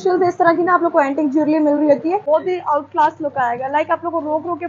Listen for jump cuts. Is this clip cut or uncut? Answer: cut